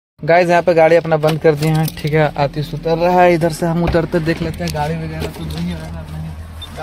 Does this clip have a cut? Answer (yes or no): no